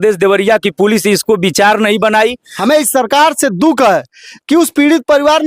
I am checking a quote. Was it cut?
yes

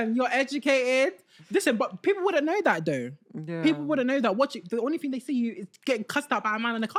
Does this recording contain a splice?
no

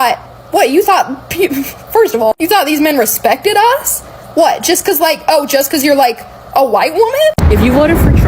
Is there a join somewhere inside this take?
yes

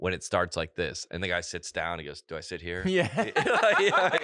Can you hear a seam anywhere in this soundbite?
no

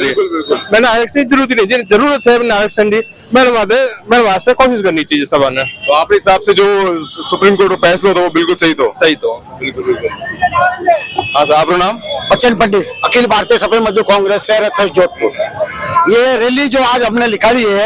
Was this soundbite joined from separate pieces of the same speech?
no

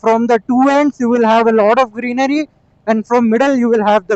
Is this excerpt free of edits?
yes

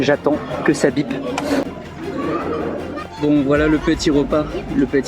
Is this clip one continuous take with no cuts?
no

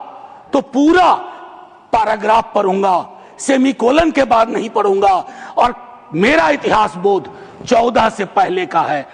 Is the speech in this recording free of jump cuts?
yes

